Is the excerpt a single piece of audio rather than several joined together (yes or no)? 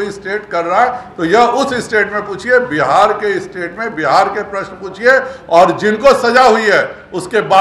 yes